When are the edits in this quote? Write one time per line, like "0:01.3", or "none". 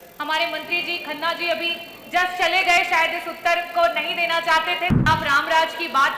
0:05.1